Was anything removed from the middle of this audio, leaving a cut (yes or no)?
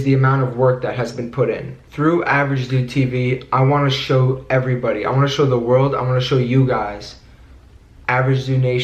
yes